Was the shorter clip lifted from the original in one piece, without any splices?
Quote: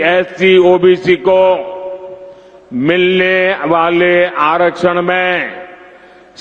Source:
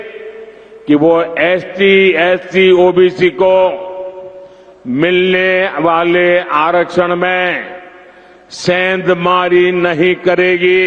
yes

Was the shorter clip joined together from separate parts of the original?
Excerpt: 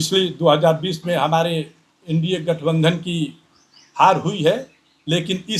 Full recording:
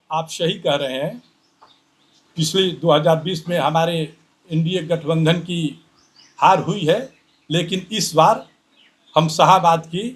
no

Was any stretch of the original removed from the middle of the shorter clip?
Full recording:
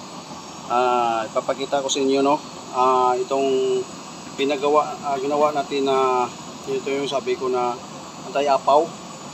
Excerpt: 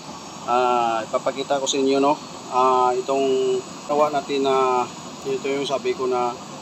yes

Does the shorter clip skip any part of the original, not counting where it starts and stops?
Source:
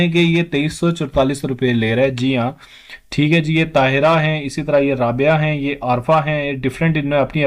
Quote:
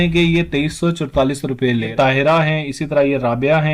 yes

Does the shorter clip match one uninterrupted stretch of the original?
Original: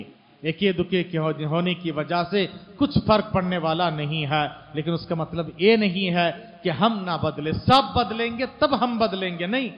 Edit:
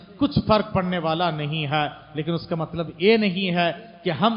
yes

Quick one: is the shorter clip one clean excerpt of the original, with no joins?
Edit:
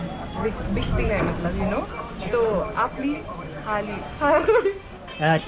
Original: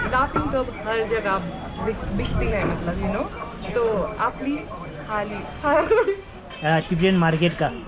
yes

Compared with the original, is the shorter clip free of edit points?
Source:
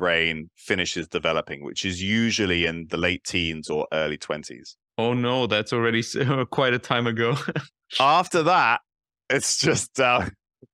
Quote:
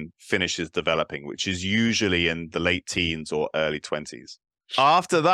no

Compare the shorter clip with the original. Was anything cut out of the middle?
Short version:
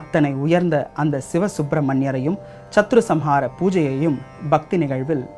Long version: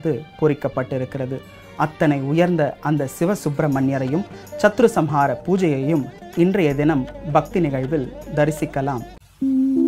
yes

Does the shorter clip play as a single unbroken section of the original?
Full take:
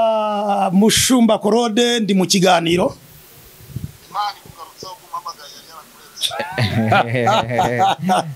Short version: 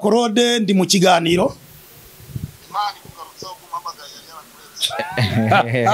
yes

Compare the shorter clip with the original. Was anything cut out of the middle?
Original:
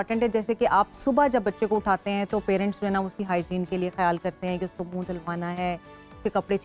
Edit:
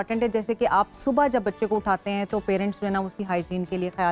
no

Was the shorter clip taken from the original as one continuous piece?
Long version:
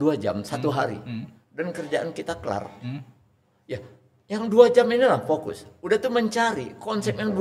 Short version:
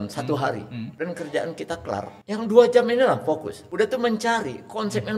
no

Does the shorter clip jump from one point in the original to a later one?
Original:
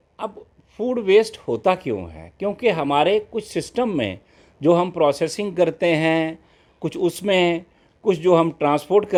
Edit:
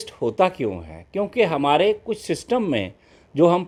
no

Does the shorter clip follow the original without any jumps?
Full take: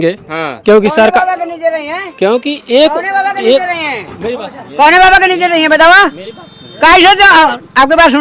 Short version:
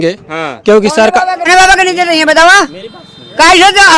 no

